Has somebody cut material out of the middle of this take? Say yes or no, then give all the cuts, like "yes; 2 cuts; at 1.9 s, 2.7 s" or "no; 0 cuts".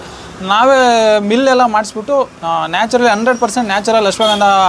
no; 0 cuts